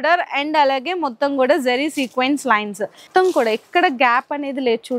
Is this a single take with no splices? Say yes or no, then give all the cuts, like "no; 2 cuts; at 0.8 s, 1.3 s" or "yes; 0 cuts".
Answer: no; 1 cut; at 3.1 s